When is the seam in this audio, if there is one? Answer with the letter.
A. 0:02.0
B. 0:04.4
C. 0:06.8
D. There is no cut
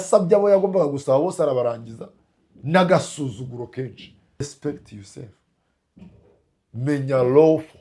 B